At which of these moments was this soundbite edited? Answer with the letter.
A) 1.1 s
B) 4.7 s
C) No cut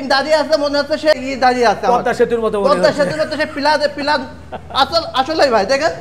A